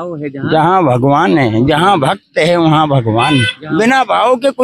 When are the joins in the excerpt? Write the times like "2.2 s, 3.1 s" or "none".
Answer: none